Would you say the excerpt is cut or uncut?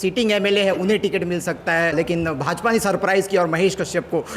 cut